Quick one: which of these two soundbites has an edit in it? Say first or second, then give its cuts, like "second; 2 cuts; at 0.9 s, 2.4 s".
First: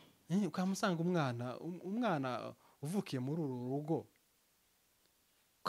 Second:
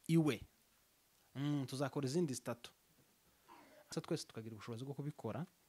second; 1 cut; at 3.9 s